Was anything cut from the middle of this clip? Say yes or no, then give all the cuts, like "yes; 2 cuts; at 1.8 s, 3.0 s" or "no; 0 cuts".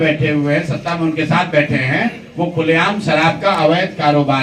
no; 0 cuts